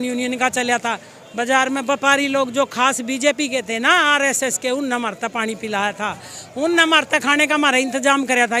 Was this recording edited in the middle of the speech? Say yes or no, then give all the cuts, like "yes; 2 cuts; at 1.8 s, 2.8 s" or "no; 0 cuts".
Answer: no; 0 cuts